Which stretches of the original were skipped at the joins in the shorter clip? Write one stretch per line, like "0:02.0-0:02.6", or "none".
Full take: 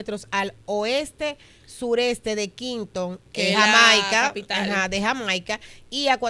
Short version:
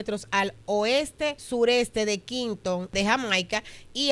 0:01.4-0:01.7
0:03.2-0:04.9